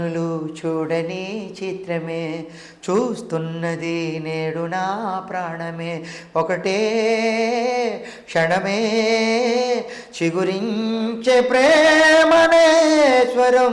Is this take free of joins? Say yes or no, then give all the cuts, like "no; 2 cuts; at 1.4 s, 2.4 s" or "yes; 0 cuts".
yes; 0 cuts